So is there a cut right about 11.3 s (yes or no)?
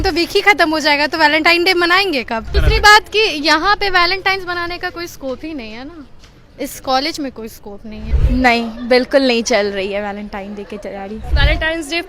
yes